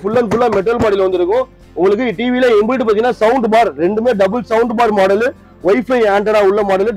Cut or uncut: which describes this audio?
uncut